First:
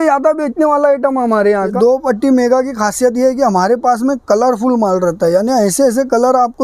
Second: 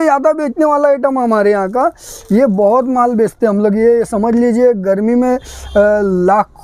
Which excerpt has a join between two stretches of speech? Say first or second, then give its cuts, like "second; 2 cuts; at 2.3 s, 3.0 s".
first; 1 cut; at 1.7 s